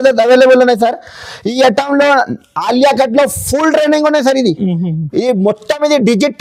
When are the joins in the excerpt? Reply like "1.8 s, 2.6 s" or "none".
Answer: none